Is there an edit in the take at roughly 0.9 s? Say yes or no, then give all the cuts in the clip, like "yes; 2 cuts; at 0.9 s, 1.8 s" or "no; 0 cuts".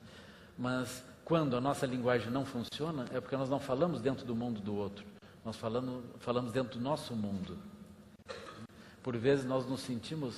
no; 1 cut; at 3.5 s